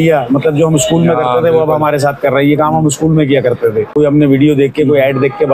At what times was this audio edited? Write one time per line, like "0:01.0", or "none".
0:03.9